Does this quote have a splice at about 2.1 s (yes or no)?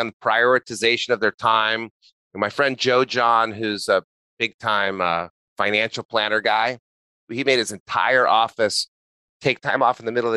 no